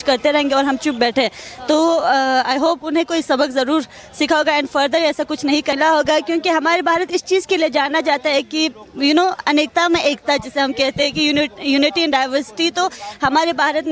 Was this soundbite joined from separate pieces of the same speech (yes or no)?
yes